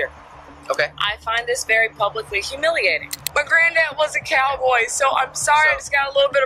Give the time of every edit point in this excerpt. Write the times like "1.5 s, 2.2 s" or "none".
3.2 s